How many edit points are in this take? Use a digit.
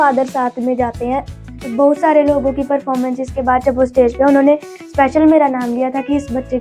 1